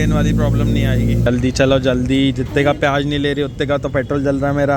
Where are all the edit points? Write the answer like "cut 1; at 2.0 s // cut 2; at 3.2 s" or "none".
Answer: cut 1; at 1.2 s